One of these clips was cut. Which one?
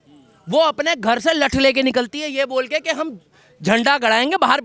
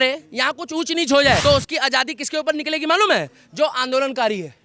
second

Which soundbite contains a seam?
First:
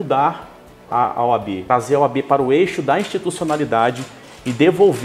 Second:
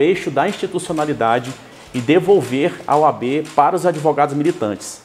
first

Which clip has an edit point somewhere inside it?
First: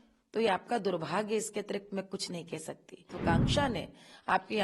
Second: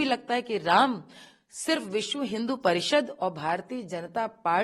first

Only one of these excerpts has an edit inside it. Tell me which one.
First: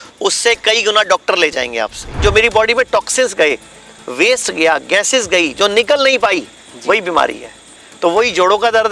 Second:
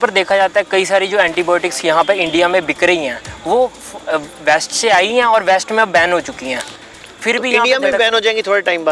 first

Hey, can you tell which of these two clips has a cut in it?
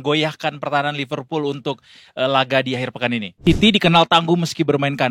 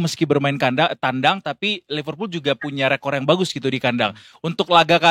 first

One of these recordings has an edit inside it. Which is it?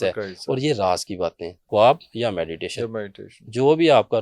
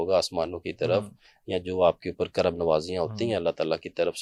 first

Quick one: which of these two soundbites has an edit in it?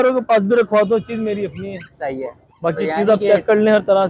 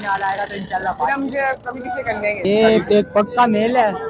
second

